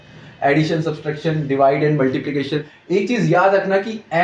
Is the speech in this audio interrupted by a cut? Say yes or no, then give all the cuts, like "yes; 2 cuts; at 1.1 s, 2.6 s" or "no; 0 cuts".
yes; 1 cut; at 2.7 s